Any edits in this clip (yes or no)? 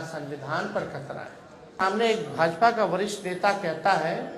yes